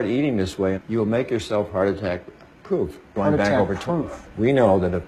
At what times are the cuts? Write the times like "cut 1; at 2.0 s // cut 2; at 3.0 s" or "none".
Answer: none